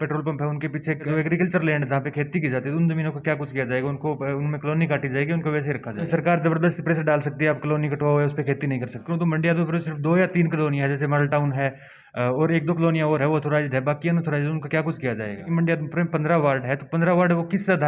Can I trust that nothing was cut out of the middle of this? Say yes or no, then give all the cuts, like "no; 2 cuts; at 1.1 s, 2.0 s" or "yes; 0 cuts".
no; 4 cuts; at 1.1 s, 6.1 s, 9.0 s, 15.5 s